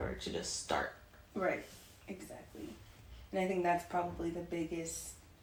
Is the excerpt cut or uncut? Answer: uncut